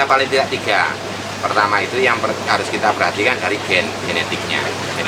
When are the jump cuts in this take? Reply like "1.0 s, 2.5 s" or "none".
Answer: none

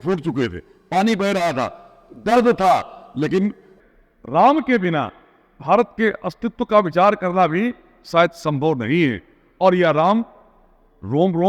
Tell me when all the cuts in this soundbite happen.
3.7 s

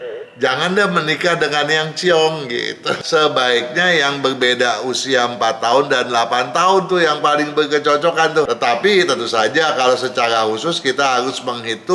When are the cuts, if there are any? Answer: 2.9 s, 8.5 s

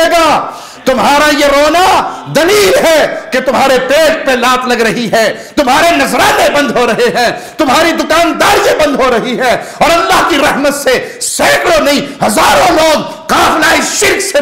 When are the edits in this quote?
none

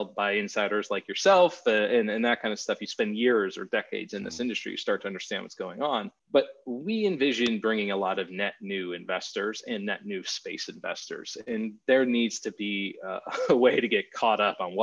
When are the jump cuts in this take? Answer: 6.2 s

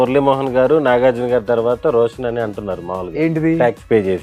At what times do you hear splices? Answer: none

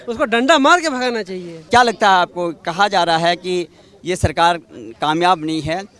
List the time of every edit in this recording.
none

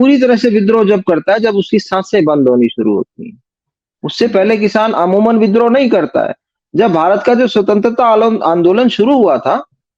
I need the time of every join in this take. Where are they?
none

